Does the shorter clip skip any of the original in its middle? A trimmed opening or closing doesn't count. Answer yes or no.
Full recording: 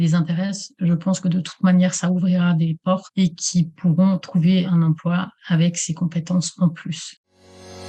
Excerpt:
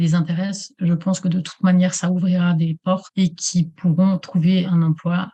no